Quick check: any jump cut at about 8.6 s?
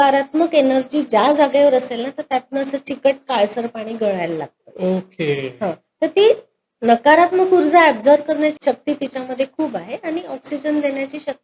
yes; 1 cut; at 8.6 s

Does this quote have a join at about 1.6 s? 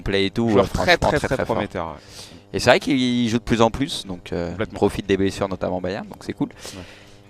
yes; 1 cut; at 1.6 s

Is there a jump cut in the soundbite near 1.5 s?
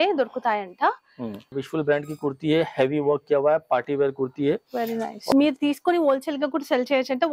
yes; 2 cuts; at 1.5 s, 5.3 s

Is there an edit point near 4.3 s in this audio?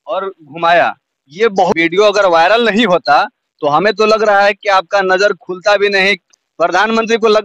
no; 2 cuts; at 1.7 s, 6.2 s

